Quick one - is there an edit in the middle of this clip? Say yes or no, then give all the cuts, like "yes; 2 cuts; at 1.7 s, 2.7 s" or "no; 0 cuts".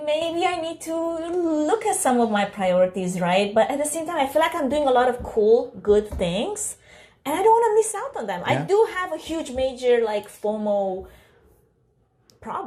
no; 0 cuts